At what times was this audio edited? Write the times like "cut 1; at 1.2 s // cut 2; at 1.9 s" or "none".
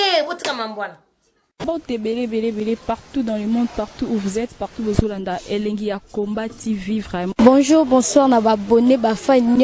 cut 1; at 1.5 s

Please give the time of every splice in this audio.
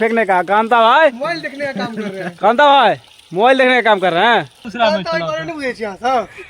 cut 1; at 4.7 s

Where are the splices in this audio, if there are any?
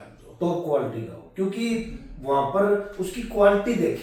none

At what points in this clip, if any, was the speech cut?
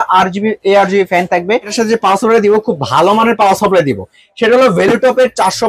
cut 1; at 1.7 s

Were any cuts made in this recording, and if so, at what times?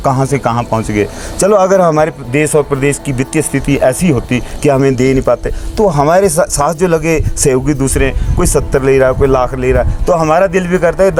none

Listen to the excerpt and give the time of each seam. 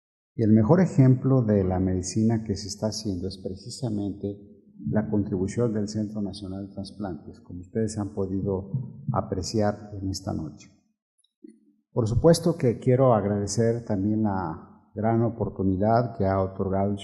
cut 1; at 8.9 s

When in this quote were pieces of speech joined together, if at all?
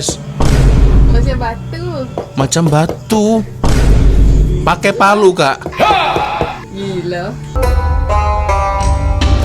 cut 1; at 7.6 s

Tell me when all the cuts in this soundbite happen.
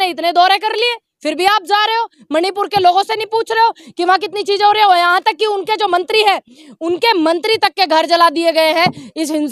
none

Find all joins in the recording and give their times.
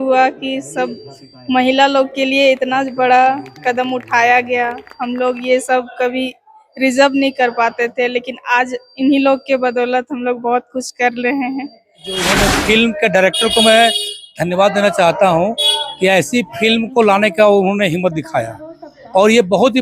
cut 1; at 12.3 s

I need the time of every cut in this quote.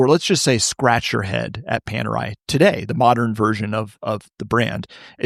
none

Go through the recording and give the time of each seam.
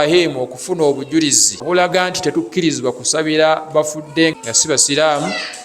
cut 1; at 1.6 s // cut 2; at 4.3 s

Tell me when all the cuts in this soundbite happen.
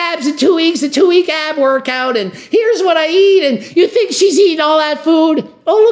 cut 1; at 3.6 s

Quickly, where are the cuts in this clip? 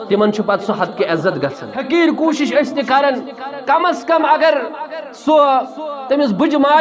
cut 1; at 1.7 s

